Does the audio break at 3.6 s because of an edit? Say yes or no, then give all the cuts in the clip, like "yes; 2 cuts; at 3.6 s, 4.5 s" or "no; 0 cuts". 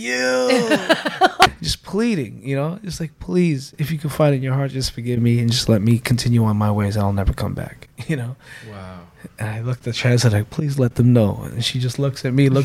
no; 1 cut; at 1.5 s